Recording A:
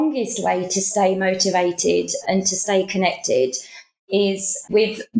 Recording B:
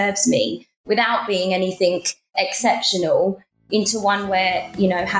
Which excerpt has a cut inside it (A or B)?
A